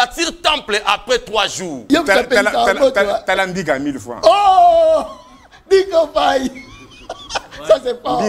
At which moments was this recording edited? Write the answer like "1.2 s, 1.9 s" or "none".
1.7 s